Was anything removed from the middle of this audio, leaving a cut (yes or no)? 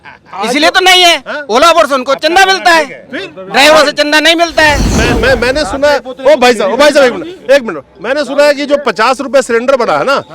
yes